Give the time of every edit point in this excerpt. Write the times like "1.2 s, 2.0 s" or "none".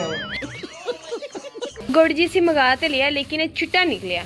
1.8 s